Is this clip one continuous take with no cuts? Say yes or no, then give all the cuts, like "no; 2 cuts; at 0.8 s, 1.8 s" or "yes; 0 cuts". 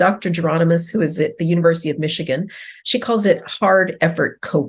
yes; 0 cuts